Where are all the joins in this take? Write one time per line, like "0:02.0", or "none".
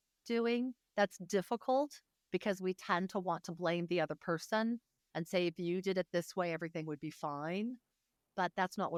none